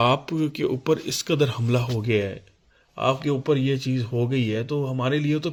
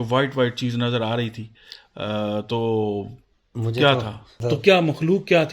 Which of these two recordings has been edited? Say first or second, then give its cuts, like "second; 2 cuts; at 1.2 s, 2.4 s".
second; 1 cut; at 4.3 s